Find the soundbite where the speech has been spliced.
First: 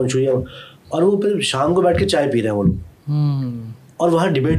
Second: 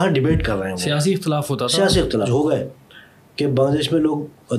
second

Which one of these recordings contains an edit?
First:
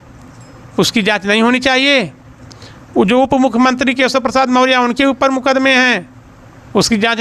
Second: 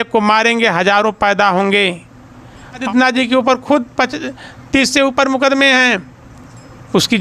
second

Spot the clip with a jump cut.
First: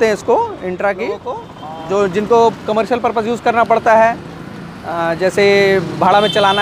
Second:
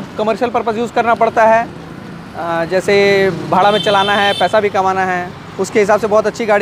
first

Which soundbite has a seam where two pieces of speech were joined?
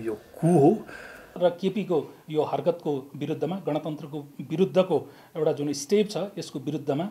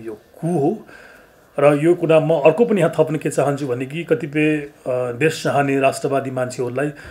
first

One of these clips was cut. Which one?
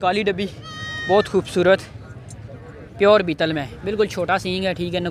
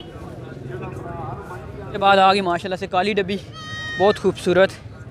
second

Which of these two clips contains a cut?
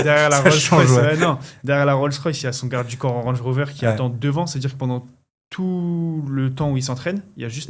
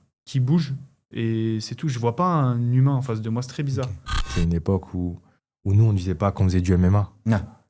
second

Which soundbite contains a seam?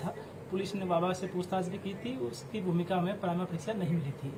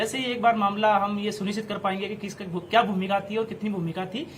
second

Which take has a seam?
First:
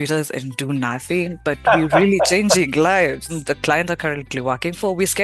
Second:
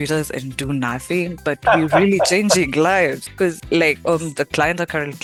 first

